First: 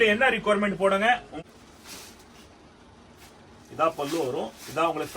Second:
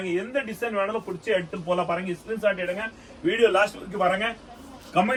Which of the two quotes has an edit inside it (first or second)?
first